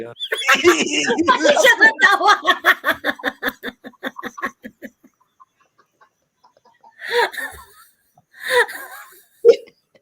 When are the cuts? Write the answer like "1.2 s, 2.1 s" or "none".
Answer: none